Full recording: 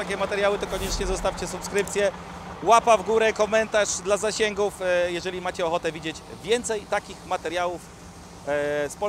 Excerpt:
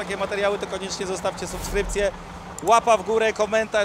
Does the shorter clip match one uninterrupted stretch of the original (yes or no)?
yes